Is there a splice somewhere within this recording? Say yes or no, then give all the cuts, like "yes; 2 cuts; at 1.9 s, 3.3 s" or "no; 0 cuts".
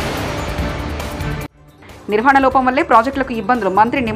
yes; 1 cut; at 1.6 s